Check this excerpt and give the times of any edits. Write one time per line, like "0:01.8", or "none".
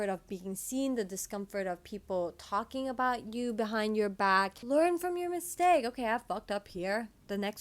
0:04.6